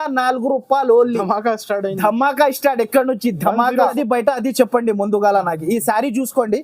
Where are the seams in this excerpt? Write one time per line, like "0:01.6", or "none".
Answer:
0:03.9